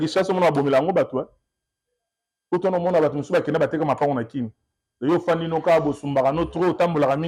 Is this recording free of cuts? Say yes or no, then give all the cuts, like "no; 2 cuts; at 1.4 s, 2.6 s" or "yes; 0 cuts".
yes; 0 cuts